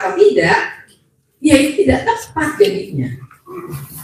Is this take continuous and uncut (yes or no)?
yes